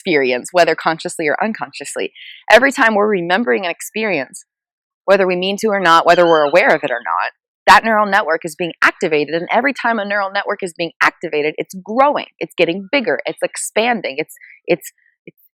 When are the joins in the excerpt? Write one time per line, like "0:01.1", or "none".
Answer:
none